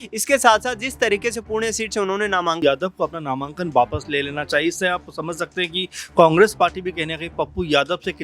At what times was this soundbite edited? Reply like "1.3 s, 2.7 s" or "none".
2.6 s

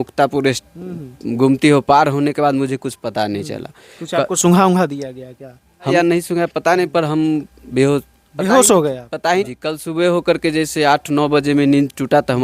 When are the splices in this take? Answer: 5.9 s, 9.5 s

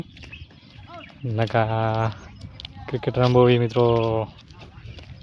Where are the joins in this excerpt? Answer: none

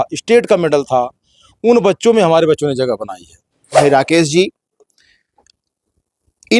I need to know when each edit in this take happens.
3.8 s

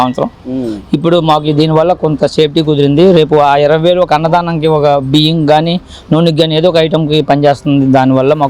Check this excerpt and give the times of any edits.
none

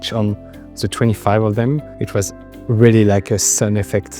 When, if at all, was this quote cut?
1.9 s

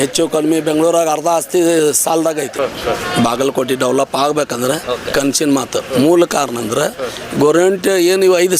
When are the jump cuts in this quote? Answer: 2.5 s

